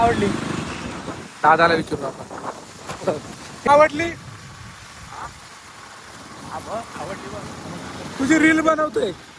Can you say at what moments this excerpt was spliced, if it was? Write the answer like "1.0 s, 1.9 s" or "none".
3.7 s